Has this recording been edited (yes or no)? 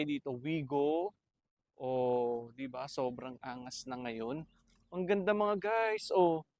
no